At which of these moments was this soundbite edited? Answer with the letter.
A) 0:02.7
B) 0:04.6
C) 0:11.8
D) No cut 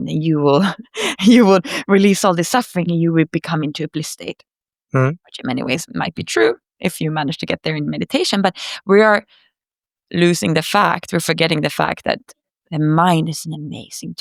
D